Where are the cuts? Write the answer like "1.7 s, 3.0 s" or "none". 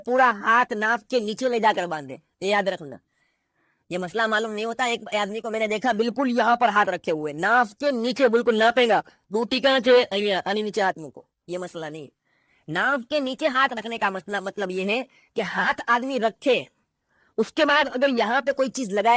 none